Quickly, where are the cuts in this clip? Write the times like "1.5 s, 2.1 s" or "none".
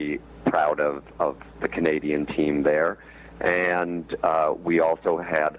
none